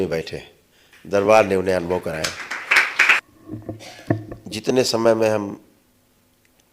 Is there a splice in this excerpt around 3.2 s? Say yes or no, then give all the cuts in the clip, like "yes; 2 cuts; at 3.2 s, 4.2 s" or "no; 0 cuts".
yes; 1 cut; at 3.2 s